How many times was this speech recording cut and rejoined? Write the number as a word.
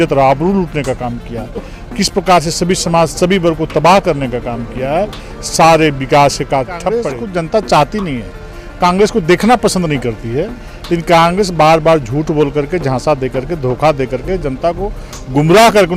one